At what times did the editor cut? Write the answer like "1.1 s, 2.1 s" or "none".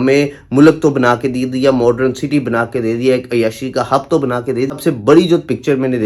4.7 s